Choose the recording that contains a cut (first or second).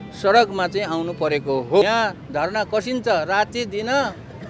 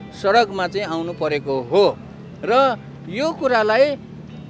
first